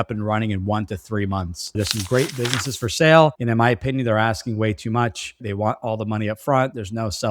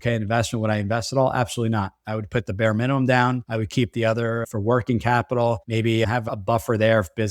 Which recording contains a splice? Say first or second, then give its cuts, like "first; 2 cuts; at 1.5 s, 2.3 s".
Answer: first; 1 cut; at 1.8 s